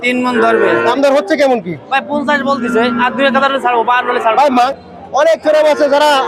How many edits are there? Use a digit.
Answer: 2